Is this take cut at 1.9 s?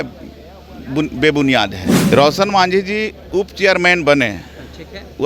yes; 1 cut; at 1.9 s

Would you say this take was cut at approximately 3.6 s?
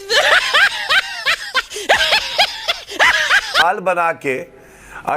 yes; 1 cut; at 3.6 s

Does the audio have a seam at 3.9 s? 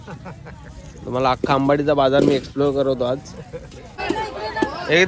yes; 1 cut; at 3.9 s

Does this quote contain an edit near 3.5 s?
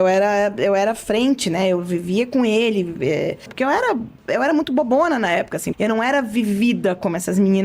yes; 2 cuts; at 3.5 s, 5.7 s

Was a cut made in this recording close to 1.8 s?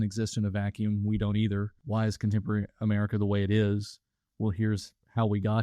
yes; 1 cut; at 1.8 s

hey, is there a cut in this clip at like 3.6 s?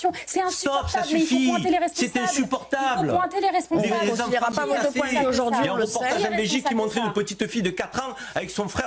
no; 0 cuts

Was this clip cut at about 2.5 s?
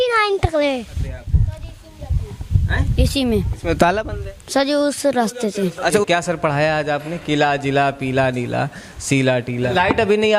no; 3 cuts; at 1.2 s, 5.8 s, 9.5 s

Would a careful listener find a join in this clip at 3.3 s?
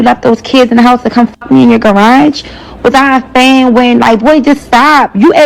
yes; 1 cut; at 3.3 s

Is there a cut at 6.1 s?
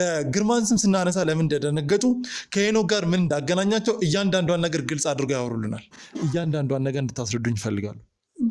yes; 1 cut; at 6.1 s

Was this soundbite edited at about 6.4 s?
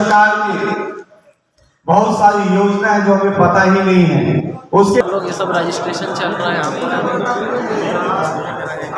no; 1 cut; at 5.0 s

